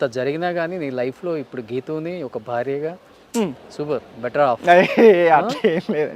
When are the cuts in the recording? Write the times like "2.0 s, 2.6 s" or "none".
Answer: none